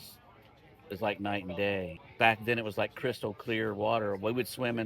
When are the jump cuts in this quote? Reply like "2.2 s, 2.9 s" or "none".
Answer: 2.0 s